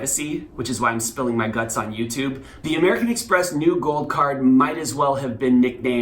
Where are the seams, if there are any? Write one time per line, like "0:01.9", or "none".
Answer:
0:02.5